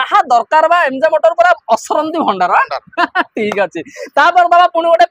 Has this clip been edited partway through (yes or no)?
no